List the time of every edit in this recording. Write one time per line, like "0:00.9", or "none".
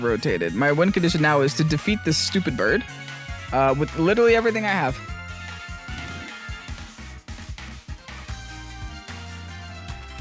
none